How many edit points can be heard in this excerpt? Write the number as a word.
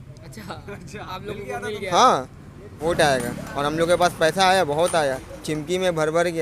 one